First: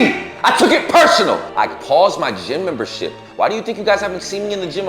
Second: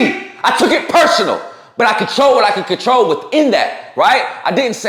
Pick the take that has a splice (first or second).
first